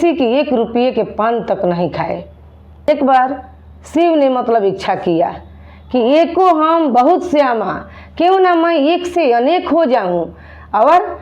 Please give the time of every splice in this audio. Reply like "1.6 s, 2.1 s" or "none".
2.9 s